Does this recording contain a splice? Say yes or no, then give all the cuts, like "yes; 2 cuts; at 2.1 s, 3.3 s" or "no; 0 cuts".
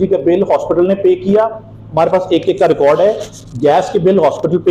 no; 0 cuts